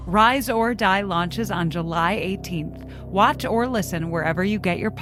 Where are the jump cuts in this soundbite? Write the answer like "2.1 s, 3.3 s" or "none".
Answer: none